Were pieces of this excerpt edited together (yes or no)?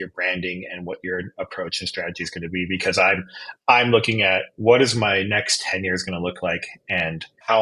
no